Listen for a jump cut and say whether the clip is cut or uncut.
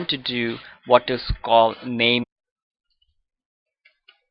uncut